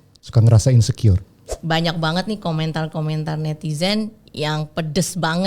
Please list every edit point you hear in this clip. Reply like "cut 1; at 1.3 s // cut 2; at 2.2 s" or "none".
cut 1; at 1.5 s